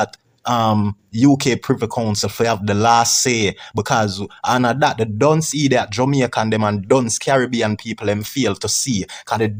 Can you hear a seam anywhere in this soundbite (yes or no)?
no